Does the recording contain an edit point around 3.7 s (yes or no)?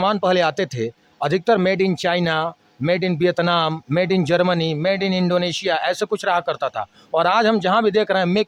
no